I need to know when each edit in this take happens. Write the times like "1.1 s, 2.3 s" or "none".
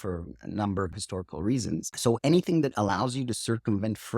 0.9 s